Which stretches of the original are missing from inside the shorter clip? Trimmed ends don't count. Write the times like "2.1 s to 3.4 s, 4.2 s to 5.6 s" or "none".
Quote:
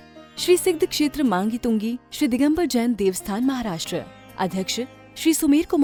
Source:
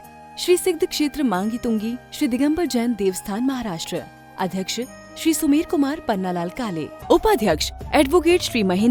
none